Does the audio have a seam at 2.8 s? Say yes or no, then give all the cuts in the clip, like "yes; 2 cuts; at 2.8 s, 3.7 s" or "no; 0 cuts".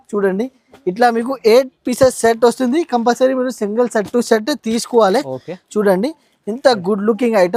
no; 0 cuts